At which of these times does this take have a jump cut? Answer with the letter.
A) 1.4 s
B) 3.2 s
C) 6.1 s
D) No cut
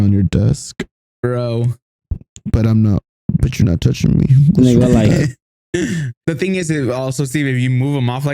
C